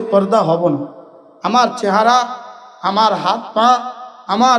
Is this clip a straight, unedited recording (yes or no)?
yes